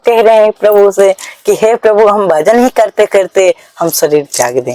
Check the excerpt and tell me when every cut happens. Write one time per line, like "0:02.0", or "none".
none